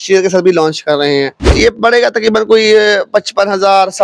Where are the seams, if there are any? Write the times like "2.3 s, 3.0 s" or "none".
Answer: 1.5 s